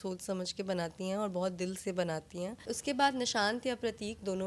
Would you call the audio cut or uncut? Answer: cut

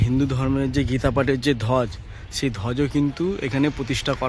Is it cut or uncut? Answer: uncut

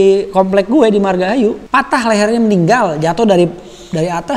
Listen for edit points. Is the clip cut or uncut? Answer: cut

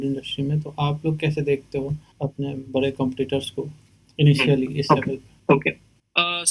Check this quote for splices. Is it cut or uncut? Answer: cut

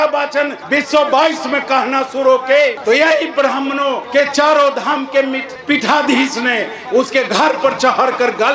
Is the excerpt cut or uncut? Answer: uncut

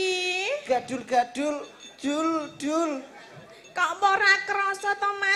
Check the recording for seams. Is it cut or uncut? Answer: uncut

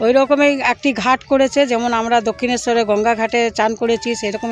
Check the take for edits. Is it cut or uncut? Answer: uncut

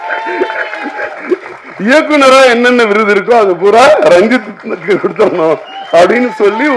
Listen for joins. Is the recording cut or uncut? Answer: uncut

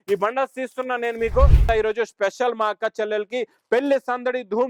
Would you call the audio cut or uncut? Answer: cut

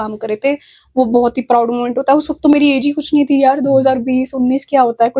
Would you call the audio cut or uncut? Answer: uncut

